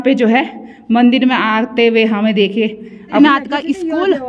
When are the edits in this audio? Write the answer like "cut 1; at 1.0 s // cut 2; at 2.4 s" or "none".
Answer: cut 1; at 3.2 s

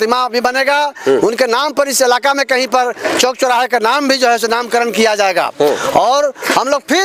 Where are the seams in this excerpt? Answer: none

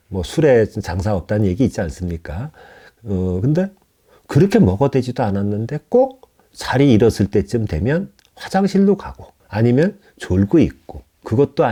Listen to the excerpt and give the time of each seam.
none

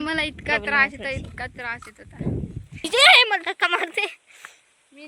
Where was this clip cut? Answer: cut 1; at 2.9 s

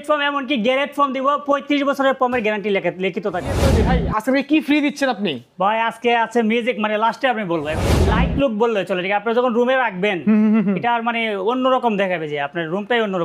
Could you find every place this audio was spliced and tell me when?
cut 1; at 3.7 s // cut 2; at 7.9 s

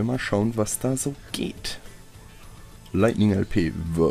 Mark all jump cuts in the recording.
cut 1; at 1.3 s

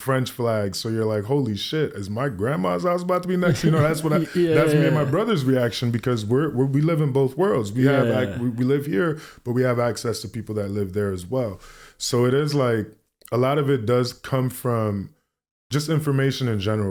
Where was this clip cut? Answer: none

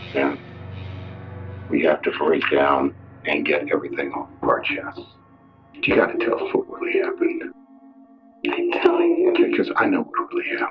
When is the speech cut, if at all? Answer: none

